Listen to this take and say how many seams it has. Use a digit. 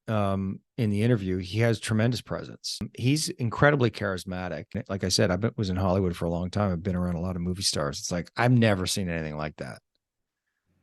2